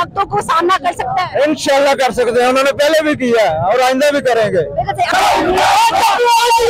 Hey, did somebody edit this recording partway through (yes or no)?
yes